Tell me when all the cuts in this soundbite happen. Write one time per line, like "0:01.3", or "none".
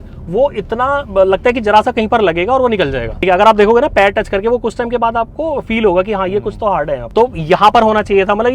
0:03.2
0:07.0